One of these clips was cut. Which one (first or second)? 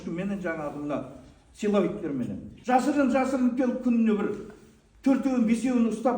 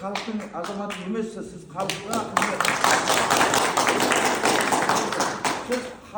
first